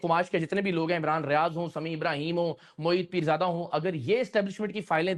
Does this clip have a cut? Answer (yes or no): no